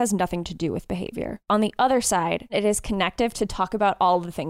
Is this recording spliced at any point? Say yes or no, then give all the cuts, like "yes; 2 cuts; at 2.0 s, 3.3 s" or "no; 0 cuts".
yes; 2 cuts; at 1.4 s, 2.5 s